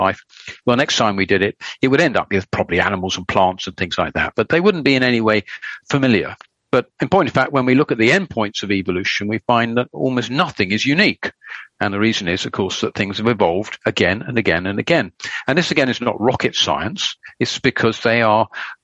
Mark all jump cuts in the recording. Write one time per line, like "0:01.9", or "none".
none